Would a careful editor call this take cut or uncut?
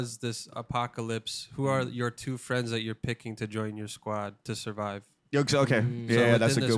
uncut